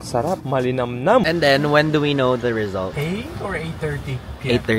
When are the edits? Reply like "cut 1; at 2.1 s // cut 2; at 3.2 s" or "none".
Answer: cut 1; at 1.2 s